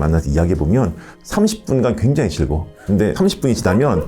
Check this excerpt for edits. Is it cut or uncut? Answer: cut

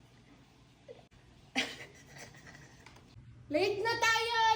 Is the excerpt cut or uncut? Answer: uncut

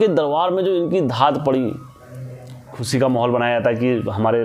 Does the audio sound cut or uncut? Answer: cut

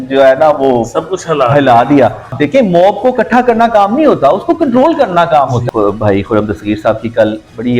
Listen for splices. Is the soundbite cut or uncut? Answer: cut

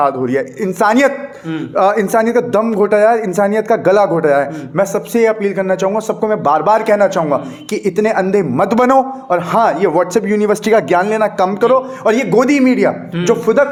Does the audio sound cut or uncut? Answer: uncut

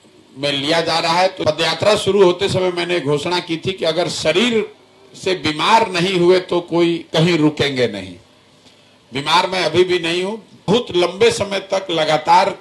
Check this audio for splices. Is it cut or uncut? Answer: cut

